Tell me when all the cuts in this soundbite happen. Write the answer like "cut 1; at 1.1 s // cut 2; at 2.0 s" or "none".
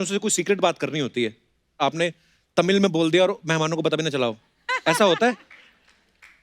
none